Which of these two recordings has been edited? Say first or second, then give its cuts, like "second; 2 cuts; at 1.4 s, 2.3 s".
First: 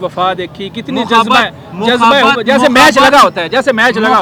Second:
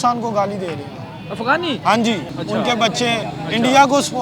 second; 1 cut; at 2.3 s